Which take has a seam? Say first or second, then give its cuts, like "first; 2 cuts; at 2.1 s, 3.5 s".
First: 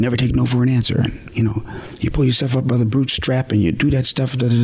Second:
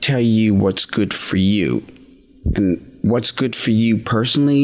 first; 1 cut; at 1.2 s